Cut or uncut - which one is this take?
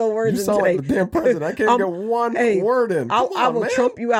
uncut